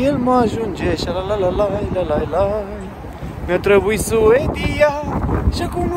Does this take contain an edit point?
no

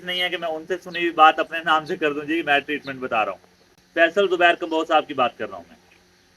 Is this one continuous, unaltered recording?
no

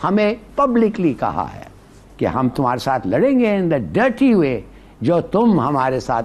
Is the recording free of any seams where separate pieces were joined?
yes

